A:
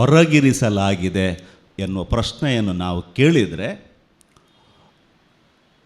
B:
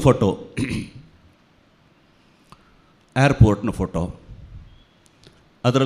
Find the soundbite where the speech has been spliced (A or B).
A